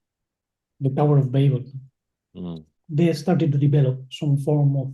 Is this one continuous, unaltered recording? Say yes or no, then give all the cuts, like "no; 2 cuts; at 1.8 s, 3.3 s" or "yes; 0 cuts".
no; 1 cut; at 2.3 s